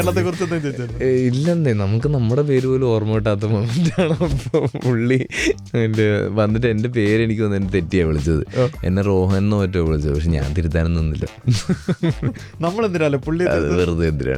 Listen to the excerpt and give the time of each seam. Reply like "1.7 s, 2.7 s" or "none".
none